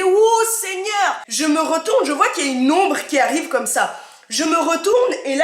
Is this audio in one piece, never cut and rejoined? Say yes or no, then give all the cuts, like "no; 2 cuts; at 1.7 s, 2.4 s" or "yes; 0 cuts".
no; 1 cut; at 1.2 s